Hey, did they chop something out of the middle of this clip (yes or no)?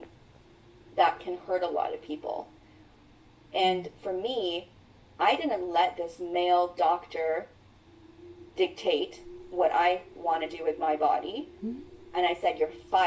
no